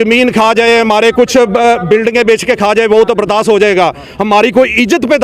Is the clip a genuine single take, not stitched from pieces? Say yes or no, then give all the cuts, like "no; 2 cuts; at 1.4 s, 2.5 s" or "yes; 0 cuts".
yes; 0 cuts